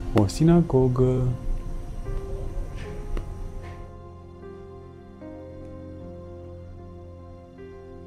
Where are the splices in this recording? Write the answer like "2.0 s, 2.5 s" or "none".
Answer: none